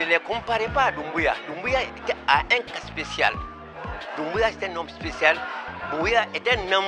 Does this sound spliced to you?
no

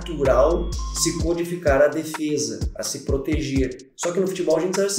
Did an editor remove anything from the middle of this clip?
yes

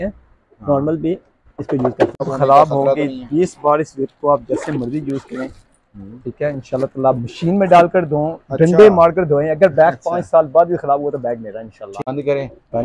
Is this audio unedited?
no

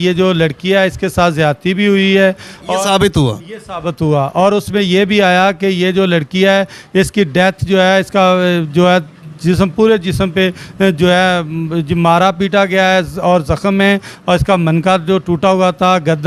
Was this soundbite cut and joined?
no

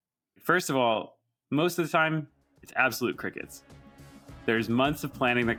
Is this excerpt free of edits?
yes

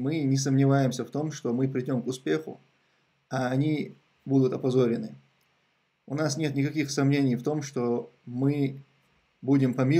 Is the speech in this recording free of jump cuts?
yes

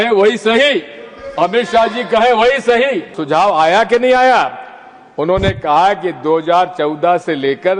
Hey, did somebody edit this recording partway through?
yes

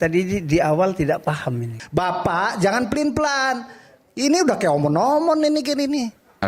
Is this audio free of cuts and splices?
no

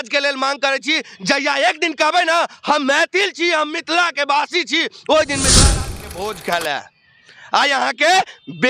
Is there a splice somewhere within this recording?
yes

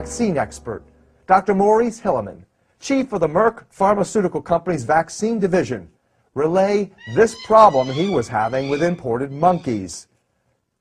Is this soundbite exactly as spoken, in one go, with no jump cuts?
no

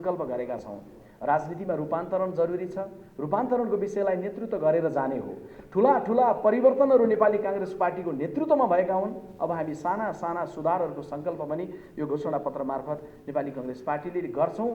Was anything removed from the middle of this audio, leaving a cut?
no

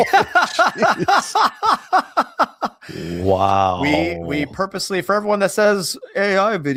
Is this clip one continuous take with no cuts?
yes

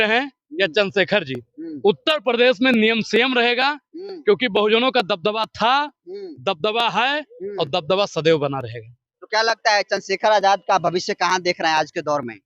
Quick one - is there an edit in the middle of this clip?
no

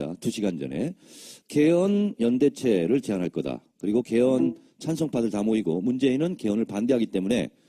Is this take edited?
yes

